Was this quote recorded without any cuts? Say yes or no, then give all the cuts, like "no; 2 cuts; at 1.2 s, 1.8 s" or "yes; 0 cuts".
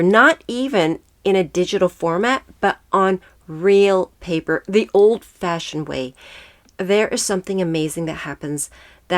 yes; 0 cuts